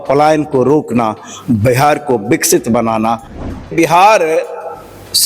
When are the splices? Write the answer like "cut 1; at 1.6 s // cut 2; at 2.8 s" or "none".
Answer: cut 1; at 3.4 s